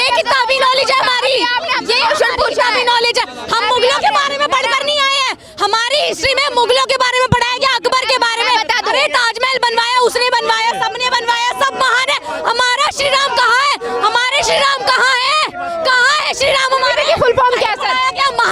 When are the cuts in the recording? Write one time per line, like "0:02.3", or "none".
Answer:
none